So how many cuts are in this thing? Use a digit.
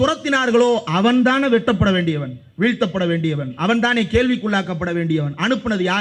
0